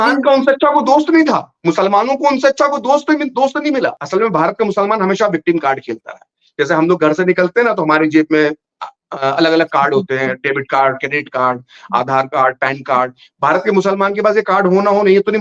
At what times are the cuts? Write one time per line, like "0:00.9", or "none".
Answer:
0:04.0